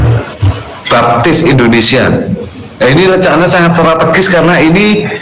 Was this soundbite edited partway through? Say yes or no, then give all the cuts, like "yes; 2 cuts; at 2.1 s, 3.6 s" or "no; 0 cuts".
no; 0 cuts